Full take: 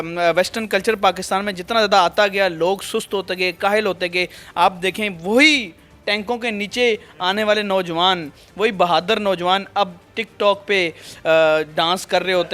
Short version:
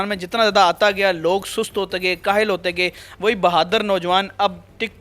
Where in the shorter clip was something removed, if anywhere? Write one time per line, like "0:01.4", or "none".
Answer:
0:03.0